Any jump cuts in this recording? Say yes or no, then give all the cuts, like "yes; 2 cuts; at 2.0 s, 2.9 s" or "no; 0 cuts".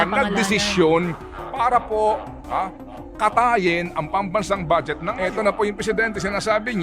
yes; 1 cut; at 5.0 s